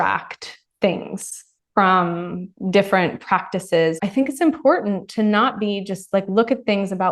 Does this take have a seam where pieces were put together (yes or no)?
yes